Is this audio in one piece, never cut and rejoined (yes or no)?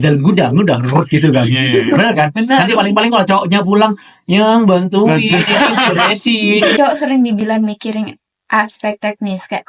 no